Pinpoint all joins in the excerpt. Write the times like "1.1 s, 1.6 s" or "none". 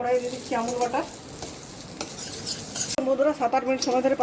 2.7 s